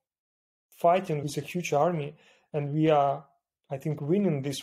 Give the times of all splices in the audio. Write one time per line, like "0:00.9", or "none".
none